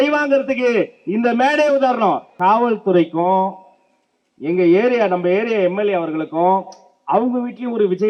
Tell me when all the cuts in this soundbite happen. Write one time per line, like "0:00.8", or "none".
0:02.3